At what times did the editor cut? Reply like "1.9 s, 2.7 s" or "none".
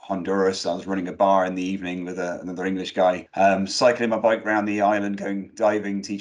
3.3 s